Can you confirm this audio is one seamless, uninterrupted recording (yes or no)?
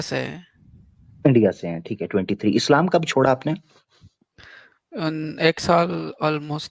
yes